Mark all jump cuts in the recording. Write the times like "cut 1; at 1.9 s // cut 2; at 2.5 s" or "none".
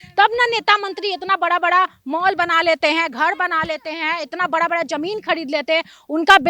none